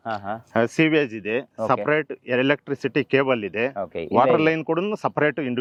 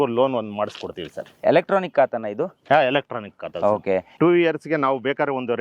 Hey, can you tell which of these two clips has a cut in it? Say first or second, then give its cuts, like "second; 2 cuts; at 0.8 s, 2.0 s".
second; 2 cuts; at 1.4 s, 4.1 s